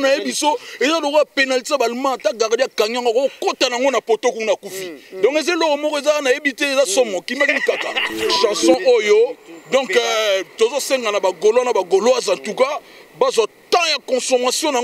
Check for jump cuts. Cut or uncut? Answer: cut